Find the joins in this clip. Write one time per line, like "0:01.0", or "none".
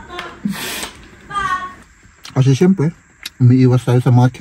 0:01.8

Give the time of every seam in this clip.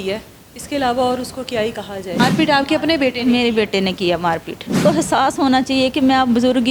0:02.2
0:04.8

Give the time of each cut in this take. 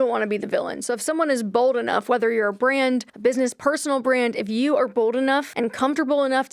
0:03.1
0:05.5

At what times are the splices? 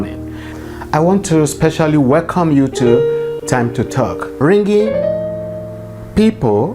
0:04.3

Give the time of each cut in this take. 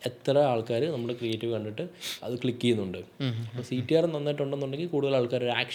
none

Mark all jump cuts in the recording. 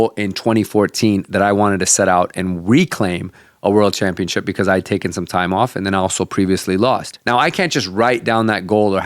0:07.1

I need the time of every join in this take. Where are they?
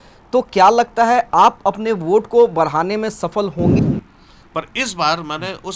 0:03.8

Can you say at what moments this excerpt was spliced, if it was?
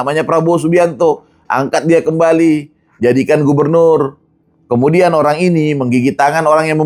none

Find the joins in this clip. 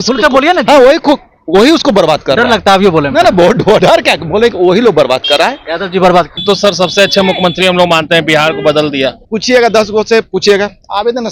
0:06.4
0:09.3

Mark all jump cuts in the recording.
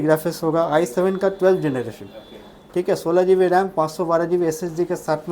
none

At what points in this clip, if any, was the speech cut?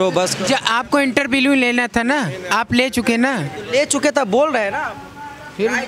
none

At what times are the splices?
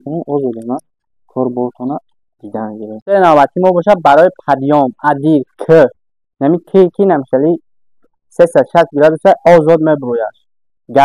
0:03.1

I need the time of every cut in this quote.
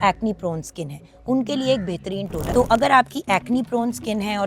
0:02.4

